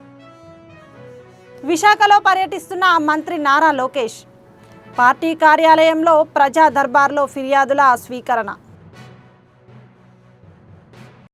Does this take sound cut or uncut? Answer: cut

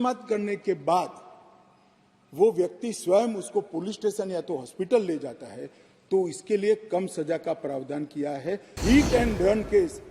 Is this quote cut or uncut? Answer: cut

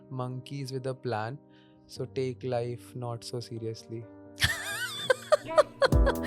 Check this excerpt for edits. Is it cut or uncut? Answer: uncut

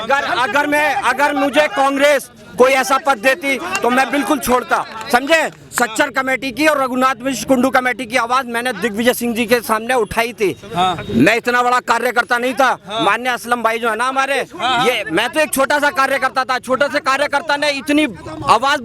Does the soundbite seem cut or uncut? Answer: uncut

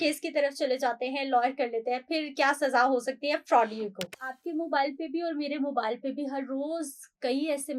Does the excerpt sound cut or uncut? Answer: cut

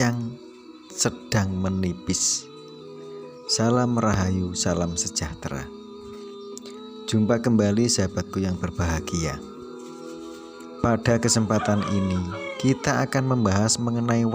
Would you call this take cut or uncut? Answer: cut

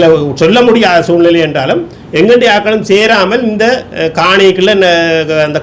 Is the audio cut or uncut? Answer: uncut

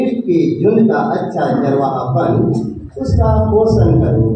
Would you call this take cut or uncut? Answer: uncut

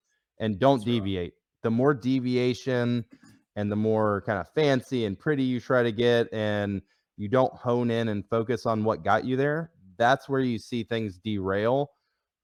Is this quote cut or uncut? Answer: uncut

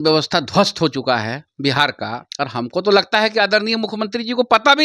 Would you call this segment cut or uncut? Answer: cut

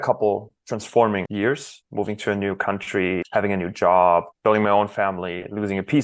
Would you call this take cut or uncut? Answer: cut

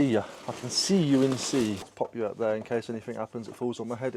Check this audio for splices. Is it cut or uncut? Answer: cut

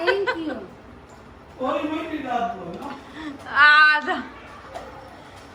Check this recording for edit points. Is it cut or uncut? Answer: uncut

